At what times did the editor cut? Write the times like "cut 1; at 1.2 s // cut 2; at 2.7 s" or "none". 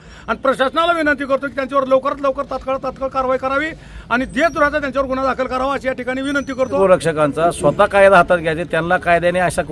cut 1; at 6.8 s